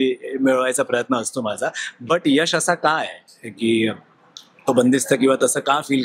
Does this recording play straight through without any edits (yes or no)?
yes